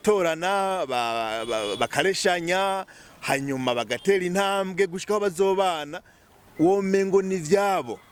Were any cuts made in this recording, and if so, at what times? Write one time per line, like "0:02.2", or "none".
none